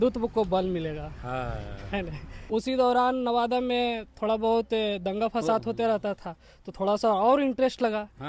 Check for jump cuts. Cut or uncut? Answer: cut